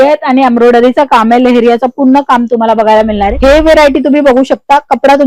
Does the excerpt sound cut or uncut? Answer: cut